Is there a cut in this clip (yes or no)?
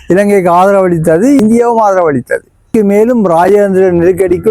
yes